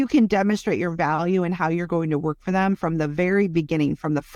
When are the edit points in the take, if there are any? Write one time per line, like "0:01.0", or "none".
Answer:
none